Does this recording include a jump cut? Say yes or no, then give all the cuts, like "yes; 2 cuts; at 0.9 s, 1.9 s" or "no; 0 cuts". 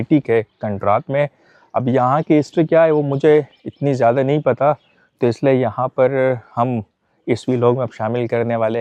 no; 0 cuts